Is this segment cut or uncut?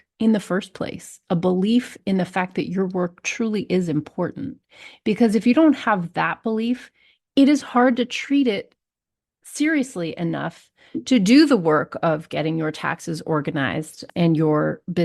cut